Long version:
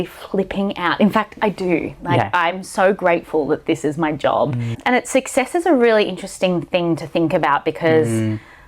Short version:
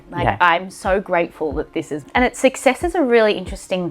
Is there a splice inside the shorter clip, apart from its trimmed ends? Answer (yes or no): yes